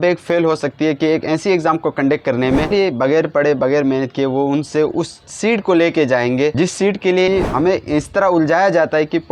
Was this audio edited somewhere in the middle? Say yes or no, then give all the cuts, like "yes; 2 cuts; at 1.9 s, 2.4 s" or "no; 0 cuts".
yes; 2 cuts; at 2.7 s, 7.3 s